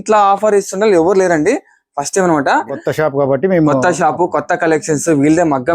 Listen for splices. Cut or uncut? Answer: cut